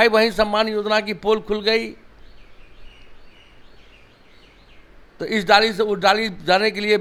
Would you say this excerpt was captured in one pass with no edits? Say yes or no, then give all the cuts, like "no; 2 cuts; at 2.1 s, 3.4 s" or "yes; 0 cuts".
yes; 0 cuts